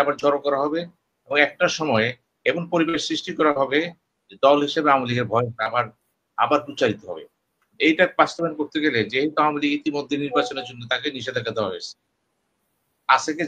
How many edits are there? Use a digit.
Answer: 0